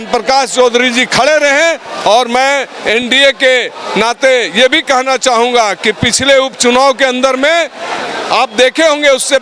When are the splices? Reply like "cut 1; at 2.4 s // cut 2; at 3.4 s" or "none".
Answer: none